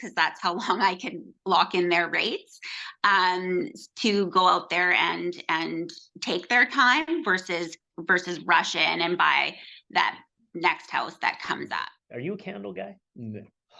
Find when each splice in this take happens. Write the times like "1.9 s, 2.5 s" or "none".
11.7 s